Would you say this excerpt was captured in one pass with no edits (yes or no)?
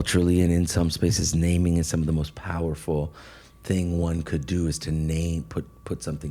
yes